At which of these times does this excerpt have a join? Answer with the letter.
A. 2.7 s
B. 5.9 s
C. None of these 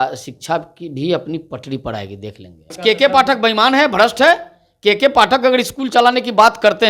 A